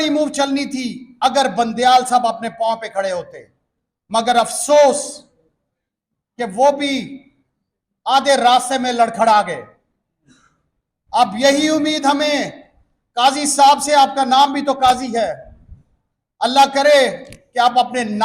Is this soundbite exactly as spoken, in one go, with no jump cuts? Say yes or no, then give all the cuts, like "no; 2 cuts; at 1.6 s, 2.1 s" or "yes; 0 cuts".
yes; 0 cuts